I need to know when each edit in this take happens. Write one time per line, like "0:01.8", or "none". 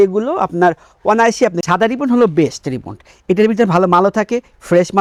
none